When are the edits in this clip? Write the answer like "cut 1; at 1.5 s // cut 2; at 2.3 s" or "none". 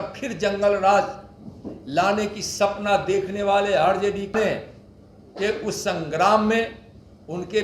cut 1; at 4.3 s